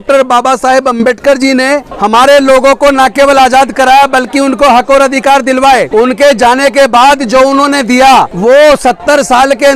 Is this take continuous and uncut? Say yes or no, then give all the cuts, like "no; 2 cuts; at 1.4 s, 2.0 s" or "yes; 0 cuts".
no; 3 cuts; at 1.9 s, 5.9 s, 8.3 s